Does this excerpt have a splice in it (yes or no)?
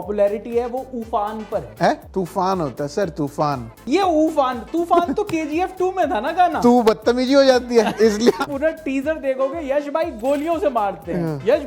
yes